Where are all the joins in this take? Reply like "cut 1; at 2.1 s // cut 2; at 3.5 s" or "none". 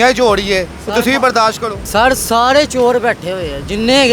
cut 1; at 1.7 s